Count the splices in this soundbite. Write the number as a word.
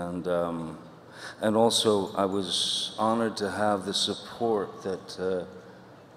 one